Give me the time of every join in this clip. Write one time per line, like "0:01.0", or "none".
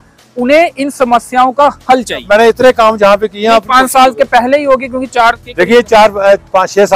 0:02.2